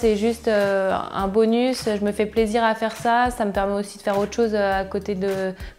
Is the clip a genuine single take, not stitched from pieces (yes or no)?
yes